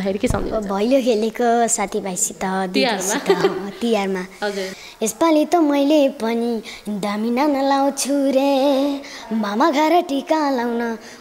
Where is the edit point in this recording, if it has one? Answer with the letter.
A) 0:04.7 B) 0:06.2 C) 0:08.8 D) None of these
A